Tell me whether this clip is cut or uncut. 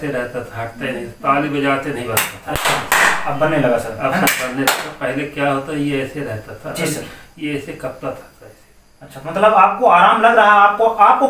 uncut